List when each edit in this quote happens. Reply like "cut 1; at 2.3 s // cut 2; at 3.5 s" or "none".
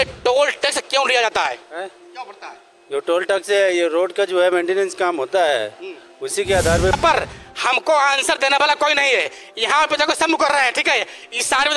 cut 1; at 6.9 s